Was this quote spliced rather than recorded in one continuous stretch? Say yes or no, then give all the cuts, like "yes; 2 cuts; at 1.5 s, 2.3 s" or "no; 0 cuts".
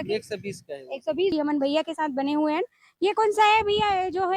yes; 1 cut; at 1.3 s